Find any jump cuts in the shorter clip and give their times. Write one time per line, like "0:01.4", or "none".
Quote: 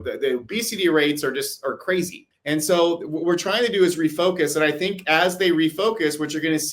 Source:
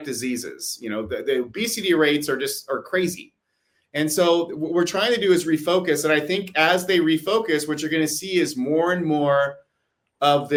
0:02.3